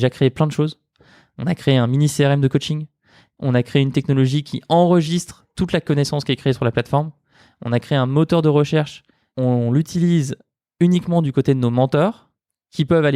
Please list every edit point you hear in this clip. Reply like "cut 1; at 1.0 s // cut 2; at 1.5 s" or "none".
cut 1; at 9.2 s